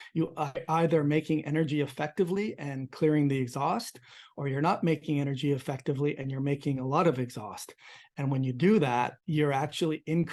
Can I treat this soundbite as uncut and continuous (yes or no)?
yes